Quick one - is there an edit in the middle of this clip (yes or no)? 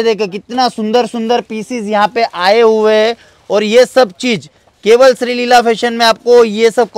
no